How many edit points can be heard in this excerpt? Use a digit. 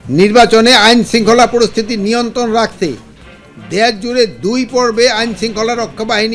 0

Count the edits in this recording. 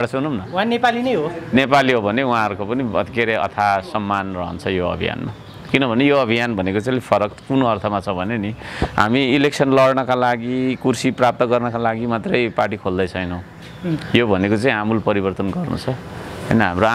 0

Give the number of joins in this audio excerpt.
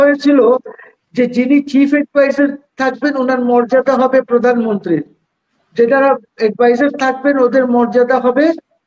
0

